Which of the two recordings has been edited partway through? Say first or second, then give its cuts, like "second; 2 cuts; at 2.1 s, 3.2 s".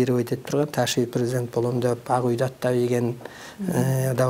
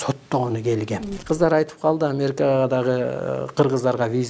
second; 1 cut; at 1.1 s